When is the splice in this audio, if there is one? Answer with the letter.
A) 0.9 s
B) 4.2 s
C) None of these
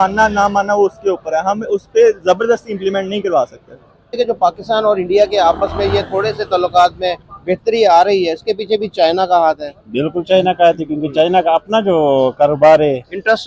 B